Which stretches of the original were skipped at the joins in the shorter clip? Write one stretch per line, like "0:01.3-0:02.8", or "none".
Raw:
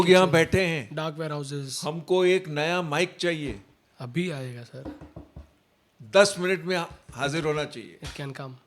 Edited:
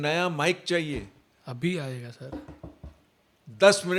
none